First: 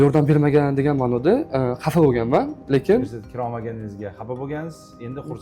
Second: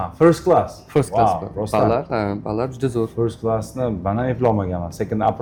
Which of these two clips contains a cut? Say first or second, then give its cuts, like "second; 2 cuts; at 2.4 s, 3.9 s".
first; 1 cut; at 3.2 s